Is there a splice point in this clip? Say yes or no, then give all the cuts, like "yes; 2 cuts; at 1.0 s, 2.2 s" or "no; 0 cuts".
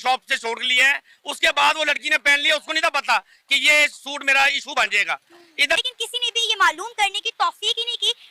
yes; 1 cut; at 5.8 s